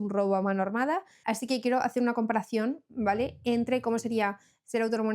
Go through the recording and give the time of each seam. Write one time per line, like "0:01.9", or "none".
0:01.1